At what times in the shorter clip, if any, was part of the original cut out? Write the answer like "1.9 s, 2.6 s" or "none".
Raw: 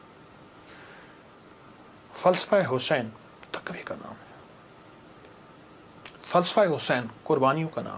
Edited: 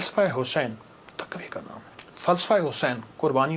2.0 s